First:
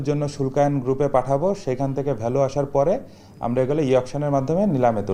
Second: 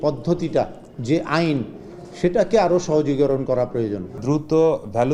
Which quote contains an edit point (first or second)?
second